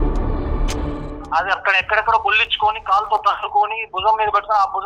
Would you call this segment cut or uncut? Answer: cut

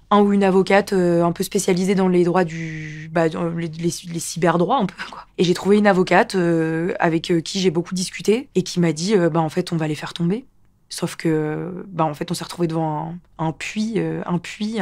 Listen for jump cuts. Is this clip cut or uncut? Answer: uncut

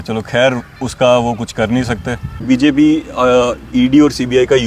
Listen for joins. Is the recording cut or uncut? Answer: cut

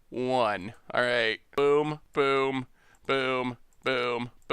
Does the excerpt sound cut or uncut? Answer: cut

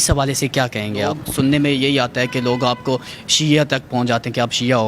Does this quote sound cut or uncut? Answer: cut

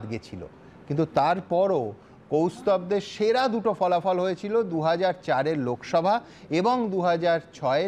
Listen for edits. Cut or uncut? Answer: uncut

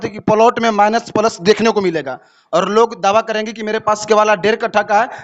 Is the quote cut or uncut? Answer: uncut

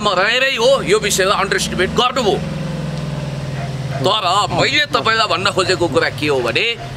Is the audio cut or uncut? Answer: uncut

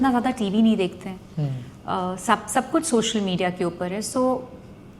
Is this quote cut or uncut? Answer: uncut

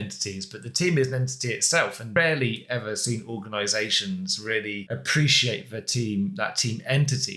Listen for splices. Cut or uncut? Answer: cut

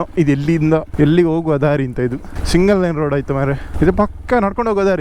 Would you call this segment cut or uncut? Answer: cut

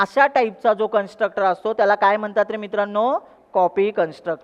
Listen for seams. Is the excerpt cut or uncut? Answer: uncut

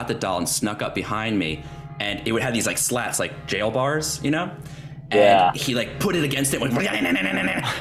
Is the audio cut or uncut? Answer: uncut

